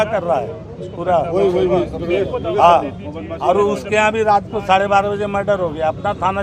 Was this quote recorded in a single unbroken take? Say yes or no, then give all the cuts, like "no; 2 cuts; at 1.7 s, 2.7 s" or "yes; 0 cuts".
yes; 0 cuts